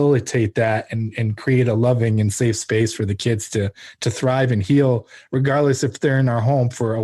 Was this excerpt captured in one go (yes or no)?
yes